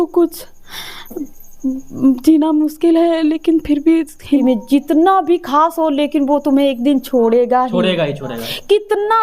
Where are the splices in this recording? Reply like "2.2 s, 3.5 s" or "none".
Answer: 4.4 s

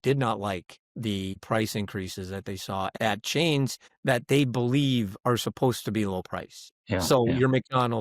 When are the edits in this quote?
1.3 s, 2.9 s, 3.9 s, 7.1 s

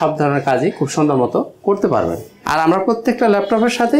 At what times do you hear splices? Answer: 2.3 s

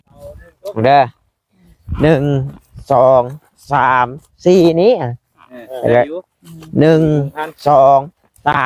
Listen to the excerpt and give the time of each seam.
none

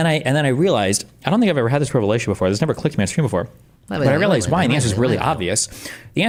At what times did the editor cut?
none

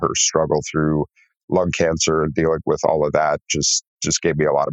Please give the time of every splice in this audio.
none

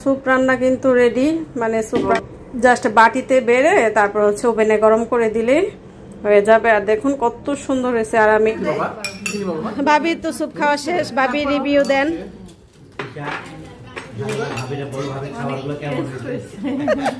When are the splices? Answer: 2.1 s, 8.5 s

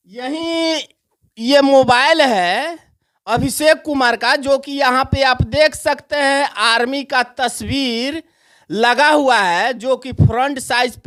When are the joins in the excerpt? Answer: none

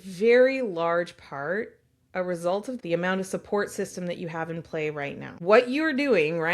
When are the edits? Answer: 2.8 s, 5.3 s

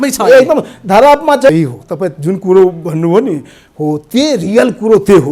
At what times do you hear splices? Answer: 1.5 s

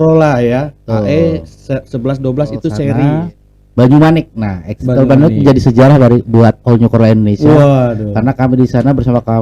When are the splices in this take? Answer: 2.9 s

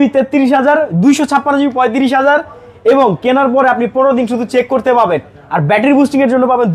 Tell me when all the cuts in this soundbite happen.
none

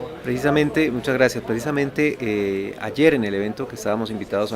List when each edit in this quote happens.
1.0 s

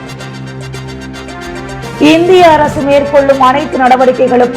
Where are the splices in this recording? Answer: 1.0 s

